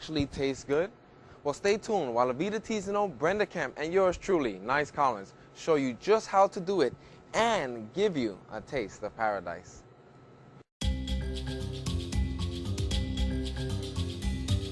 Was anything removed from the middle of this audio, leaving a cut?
no; 0 cuts

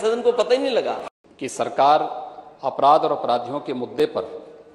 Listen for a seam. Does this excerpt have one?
yes; 1 cut; at 1.1 s

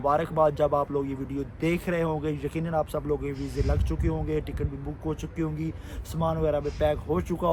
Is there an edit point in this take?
no; 0 cuts

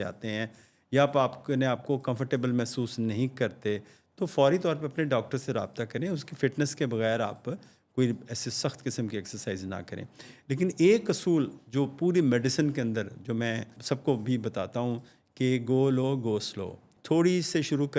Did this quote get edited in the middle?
yes; 2 cuts; at 13.7 s, 16.9 s

